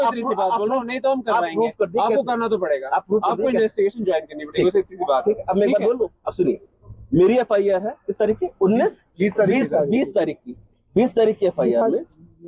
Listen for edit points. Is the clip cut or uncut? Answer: uncut